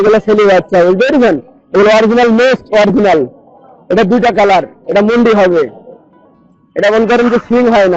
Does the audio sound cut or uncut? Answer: uncut